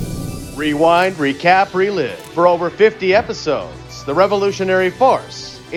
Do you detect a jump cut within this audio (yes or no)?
no